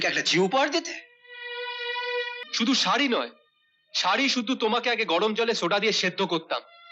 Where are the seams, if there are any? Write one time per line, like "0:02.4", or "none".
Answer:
0:02.4